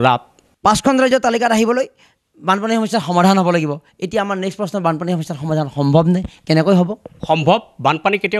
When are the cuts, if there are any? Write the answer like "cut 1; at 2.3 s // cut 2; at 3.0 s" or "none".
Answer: cut 1; at 0.9 s

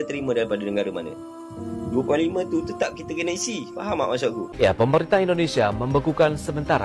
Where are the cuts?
cut 1; at 4.5 s

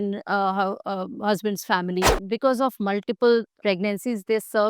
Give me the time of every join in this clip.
cut 1; at 2.2 s // cut 2; at 3.5 s

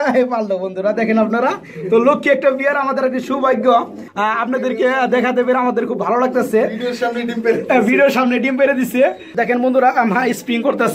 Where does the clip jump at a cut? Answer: cut 1; at 9.3 s

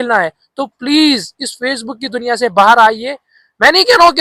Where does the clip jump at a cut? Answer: none

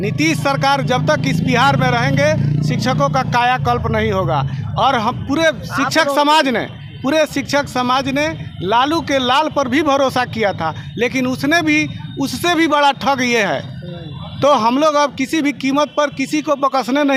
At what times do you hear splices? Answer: none

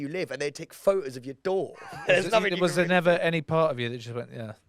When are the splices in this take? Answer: cut 1; at 1.8 s

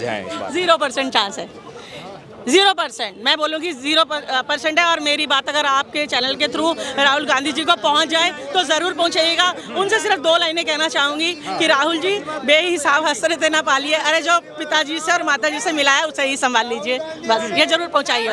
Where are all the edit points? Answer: none

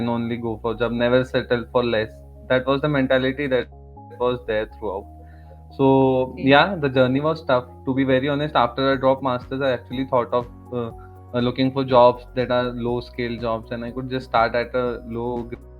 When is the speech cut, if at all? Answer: none

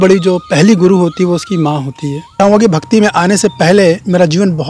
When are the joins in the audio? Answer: cut 1; at 2.3 s

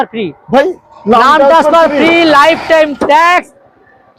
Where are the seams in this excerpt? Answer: none

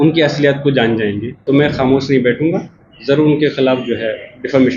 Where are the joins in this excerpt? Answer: cut 1; at 1.3 s

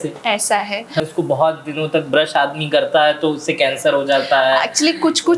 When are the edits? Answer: cut 1; at 1.0 s

